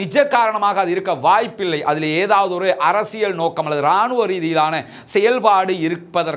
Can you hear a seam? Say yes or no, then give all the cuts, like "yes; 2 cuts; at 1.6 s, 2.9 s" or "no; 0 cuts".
no; 0 cuts